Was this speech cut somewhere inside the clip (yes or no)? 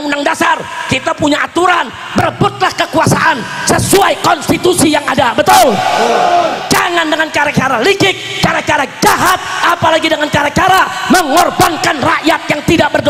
no